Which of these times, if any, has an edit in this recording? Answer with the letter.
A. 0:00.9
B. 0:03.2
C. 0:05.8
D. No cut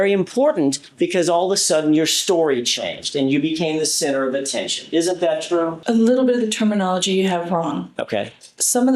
C